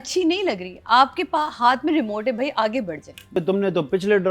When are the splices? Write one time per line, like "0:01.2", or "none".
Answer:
0:03.4